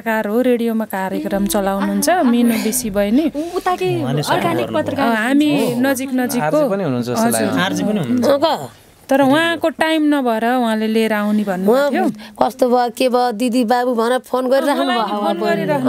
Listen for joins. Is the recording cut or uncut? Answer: uncut